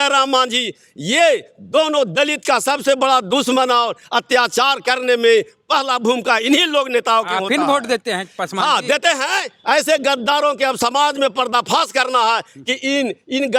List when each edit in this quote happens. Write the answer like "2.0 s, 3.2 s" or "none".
none